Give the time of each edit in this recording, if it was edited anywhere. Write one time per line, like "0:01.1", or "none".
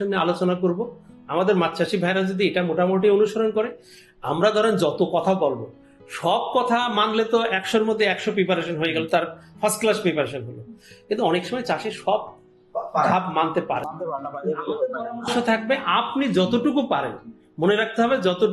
none